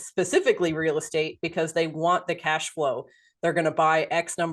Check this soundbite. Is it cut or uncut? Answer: cut